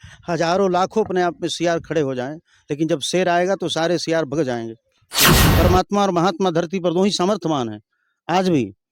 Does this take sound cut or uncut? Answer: cut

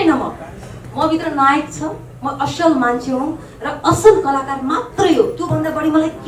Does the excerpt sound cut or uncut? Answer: uncut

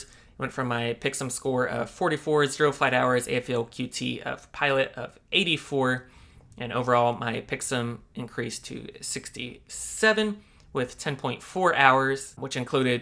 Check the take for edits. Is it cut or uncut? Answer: uncut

